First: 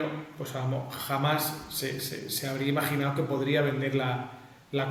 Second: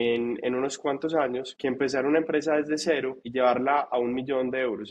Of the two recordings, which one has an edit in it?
second; 2 cuts; at 1.5 s, 3.2 s

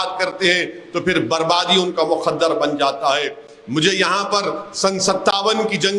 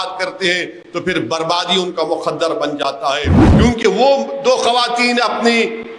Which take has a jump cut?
second; 1 cut; at 3.4 s

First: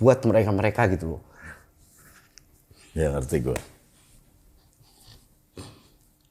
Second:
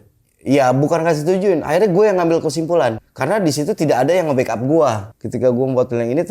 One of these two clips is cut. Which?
second; 2 cuts; at 3.1 s, 5.1 s

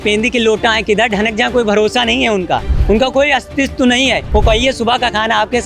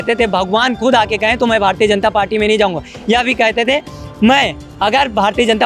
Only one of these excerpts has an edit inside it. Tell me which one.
first; 2 cuts; at 2.7 s, 4.2 s

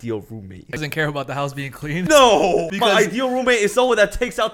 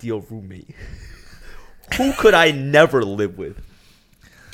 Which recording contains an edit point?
first; 3 cuts; at 0.8 s, 2.1 s, 2.7 s

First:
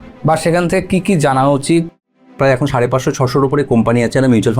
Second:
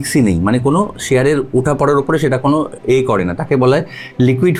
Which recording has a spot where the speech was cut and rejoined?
first; 1 cut; at 2.4 s

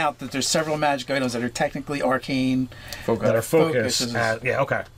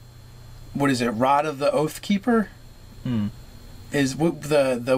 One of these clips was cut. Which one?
second; 1 cut; at 1.0 s

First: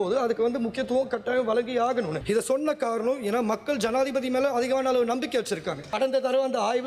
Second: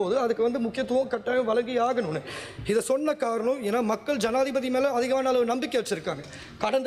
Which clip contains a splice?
first; 2 cuts; at 2.2 s, 5.9 s

